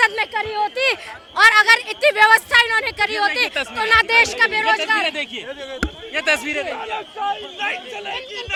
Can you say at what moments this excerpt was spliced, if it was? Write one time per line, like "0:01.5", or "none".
none